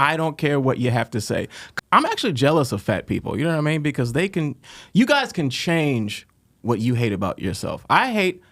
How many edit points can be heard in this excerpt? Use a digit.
1